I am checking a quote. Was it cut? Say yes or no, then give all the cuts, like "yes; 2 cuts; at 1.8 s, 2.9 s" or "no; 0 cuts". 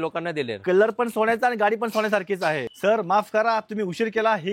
yes; 1 cut; at 2.7 s